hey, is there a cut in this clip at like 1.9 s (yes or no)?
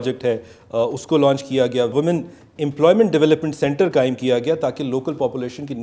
yes